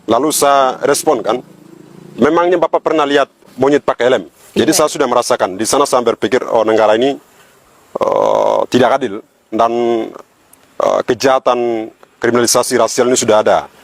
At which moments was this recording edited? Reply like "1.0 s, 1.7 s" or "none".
3.5 s, 4.3 s